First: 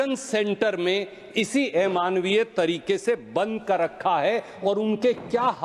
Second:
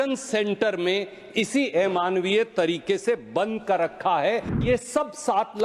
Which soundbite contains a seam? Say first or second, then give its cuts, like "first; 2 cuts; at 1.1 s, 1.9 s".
second; 1 cut; at 4.6 s